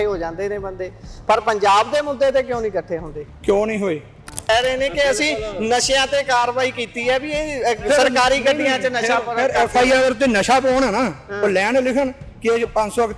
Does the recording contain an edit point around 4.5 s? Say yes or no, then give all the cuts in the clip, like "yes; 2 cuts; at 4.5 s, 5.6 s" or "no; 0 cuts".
yes; 1 cut; at 4.5 s